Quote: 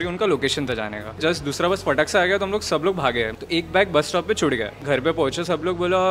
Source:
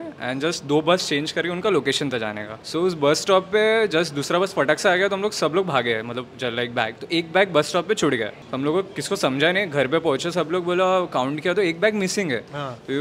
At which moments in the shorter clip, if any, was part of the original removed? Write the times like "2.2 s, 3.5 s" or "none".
1.2 s, 3.4 s, 4.8 s